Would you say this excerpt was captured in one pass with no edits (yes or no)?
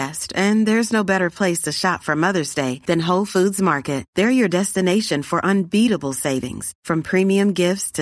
yes